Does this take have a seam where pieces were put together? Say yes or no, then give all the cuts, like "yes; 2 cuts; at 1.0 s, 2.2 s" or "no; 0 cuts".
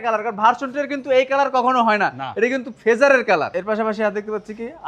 yes; 1 cut; at 3.5 s